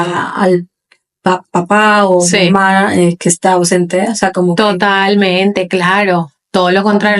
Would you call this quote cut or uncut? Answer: uncut